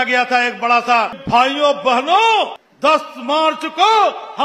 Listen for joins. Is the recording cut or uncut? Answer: cut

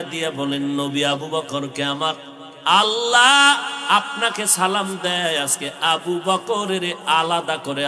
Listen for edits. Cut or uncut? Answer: uncut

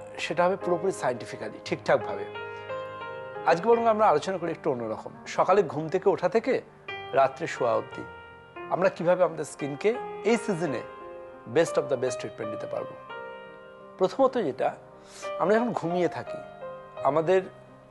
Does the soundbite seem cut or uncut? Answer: uncut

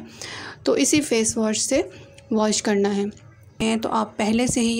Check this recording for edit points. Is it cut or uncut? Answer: cut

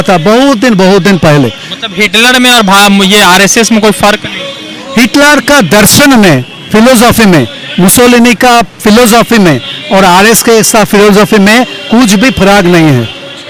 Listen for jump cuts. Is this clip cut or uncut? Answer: uncut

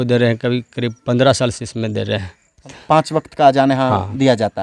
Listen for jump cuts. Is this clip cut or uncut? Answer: cut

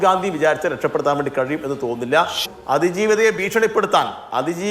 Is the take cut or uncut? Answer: cut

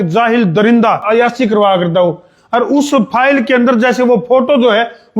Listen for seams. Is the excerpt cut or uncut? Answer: cut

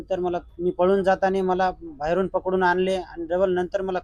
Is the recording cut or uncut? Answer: uncut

